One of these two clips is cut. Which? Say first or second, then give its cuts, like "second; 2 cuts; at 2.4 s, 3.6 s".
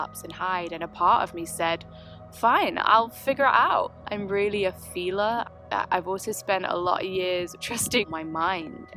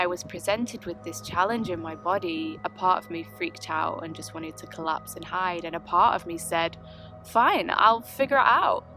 first; 1 cut; at 7.6 s